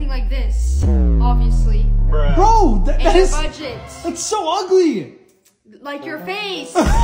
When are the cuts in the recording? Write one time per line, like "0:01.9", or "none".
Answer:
none